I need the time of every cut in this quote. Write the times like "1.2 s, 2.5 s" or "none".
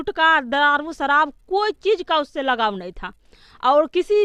none